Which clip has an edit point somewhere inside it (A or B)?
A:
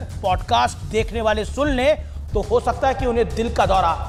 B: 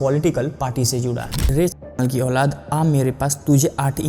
B